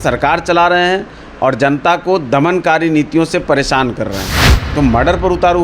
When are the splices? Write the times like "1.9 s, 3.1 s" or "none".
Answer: 4.3 s